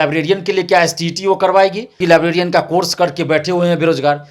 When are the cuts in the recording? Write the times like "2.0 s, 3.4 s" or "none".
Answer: 1.9 s